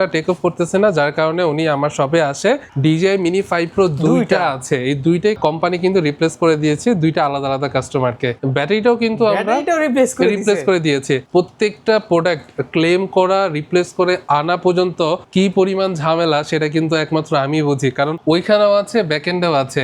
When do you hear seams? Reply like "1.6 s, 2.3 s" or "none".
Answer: 2.7 s, 5.4 s, 8.4 s, 11.2 s, 15.2 s, 18.2 s

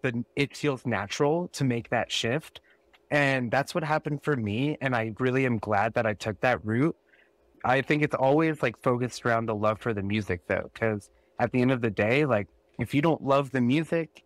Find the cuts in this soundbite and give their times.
7.5 s

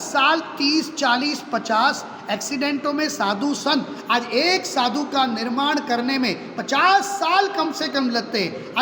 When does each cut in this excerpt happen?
none

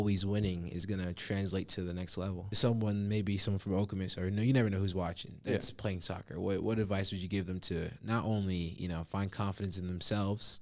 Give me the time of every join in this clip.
2.5 s

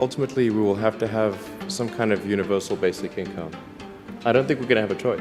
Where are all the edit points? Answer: none

